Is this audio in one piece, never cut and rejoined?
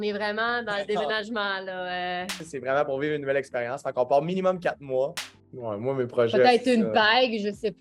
no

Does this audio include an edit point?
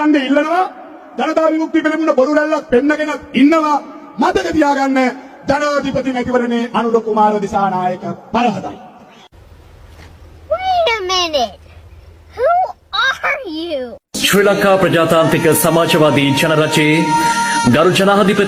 no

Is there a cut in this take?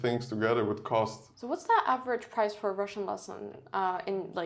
yes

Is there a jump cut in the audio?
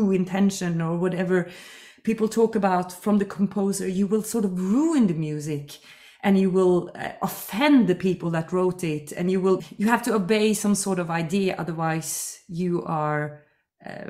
yes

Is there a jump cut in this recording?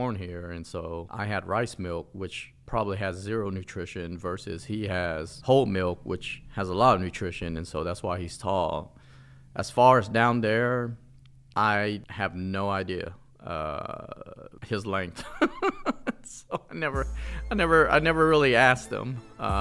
no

